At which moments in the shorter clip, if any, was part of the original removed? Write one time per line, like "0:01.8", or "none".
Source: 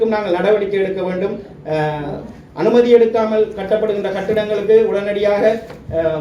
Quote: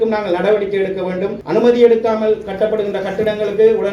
0:01.4